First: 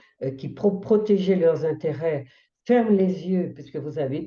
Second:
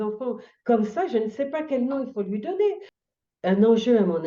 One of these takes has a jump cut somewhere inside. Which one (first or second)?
second